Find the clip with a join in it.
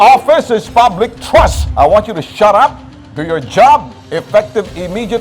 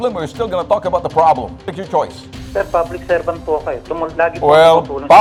first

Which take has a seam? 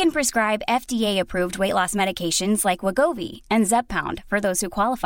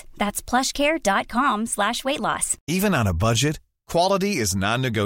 second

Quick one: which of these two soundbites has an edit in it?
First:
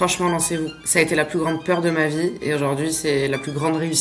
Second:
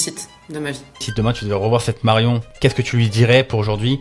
second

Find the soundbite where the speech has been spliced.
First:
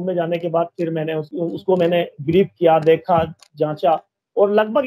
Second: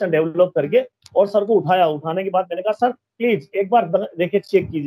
first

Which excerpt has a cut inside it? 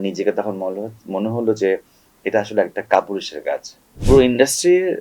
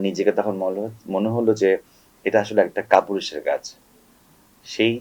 first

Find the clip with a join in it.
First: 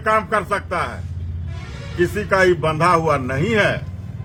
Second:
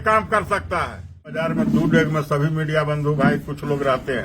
second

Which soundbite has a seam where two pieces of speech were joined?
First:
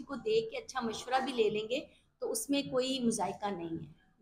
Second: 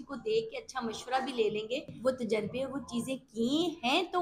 second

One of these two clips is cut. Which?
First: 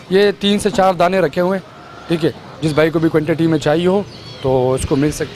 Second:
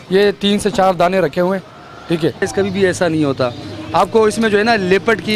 second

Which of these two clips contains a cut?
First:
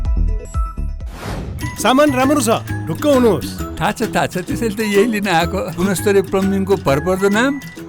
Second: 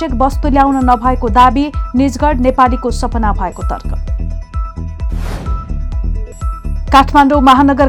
first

